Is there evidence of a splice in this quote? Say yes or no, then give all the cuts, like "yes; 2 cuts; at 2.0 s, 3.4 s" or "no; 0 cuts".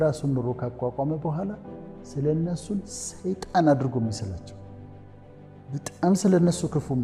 yes; 2 cuts; at 4.4 s, 5.7 s